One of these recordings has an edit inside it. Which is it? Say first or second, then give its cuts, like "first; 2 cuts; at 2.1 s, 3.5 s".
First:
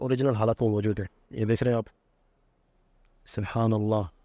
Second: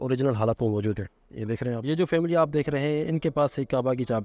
second; 1 cut; at 1.8 s